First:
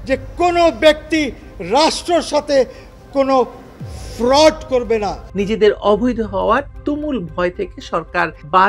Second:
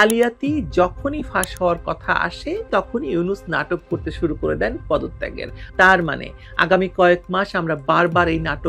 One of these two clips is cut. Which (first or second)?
first